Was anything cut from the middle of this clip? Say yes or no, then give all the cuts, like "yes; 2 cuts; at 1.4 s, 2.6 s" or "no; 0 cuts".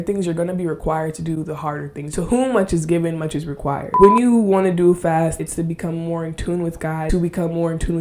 yes; 4 cuts; at 2.0 s, 3.9 s, 5.4 s, 7.1 s